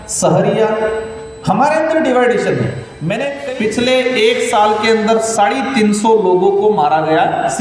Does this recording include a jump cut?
yes; 1 cut; at 3.3 s

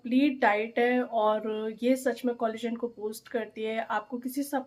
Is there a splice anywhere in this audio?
no; 0 cuts

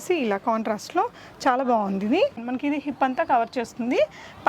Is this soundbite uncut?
no; 1 cut; at 2.4 s

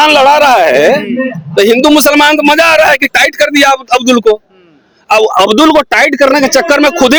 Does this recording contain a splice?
no; 0 cuts

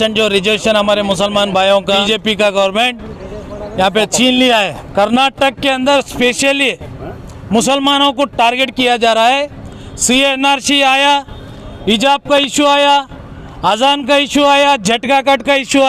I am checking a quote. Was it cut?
yes; 2 cuts; at 2.0 s, 4.8 s

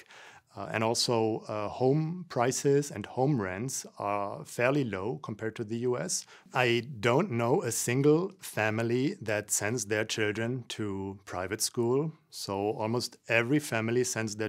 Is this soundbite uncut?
no; 1 cut; at 6.5 s

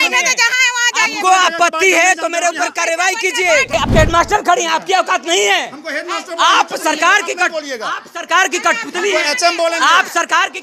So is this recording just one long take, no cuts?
no; 1 cut; at 3.7 s

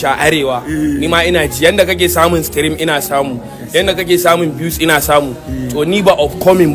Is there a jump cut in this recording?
no; 0 cuts

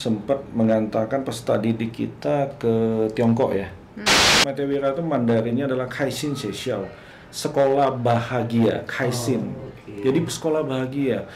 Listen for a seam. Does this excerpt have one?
yes; 1 cut; at 4.3 s

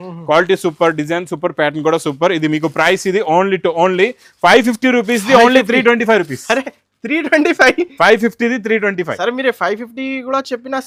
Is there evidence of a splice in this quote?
no; 0 cuts

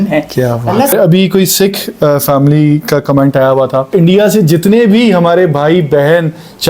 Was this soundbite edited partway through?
yes; 2 cuts; at 0.9 s, 3.9 s

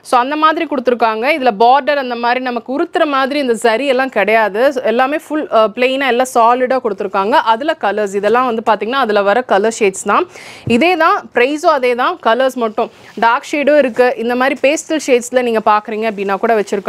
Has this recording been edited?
no; 0 cuts

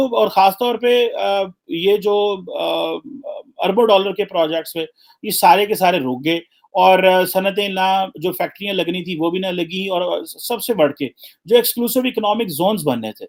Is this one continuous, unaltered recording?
yes; 0 cuts

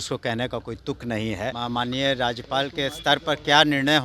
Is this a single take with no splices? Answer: no; 1 cut; at 1.6 s

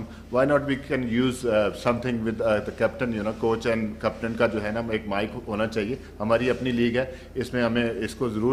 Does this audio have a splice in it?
no; 0 cuts

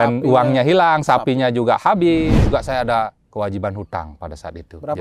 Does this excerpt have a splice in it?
yes; 1 cut; at 2.4 s

